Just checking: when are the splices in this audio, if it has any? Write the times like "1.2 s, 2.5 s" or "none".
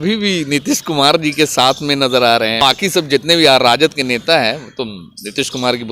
2.6 s